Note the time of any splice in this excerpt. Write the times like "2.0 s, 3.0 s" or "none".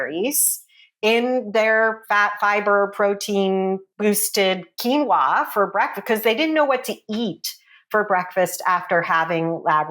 3.9 s

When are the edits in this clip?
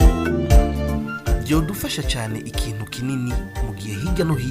1.3 s

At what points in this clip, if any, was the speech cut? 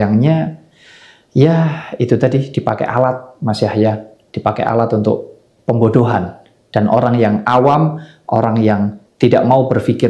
9.0 s

